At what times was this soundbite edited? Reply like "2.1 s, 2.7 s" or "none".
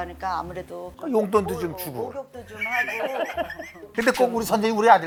none